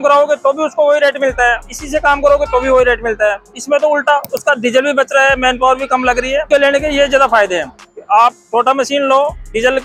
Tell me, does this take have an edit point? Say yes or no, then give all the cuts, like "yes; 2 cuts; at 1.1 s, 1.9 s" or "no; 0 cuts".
no; 0 cuts